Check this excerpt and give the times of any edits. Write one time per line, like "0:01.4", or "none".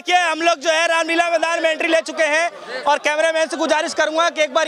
none